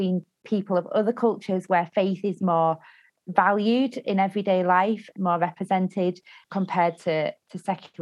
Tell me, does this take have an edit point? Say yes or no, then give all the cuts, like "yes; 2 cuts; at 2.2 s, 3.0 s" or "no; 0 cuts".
no; 0 cuts